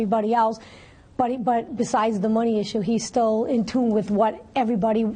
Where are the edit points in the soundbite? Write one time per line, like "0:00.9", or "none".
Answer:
none

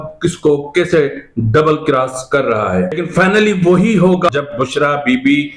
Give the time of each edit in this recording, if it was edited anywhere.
0:03.0
0:04.3

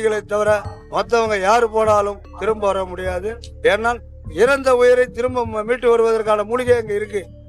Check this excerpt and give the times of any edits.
0:04.2

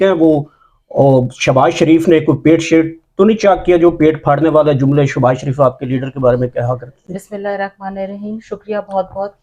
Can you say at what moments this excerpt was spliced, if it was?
none

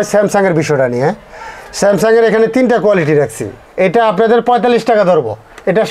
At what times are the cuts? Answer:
0:03.6

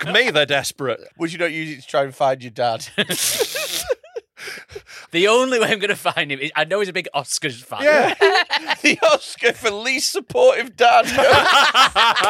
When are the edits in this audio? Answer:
0:01.1
0:05.0
0:08.7

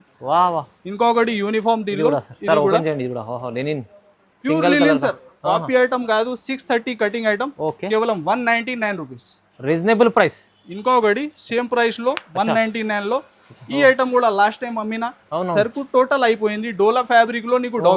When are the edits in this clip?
none

